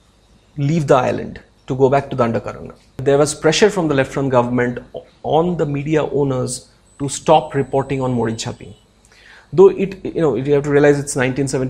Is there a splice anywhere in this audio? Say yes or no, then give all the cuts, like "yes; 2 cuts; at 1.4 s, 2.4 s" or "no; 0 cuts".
yes; 1 cut; at 3.0 s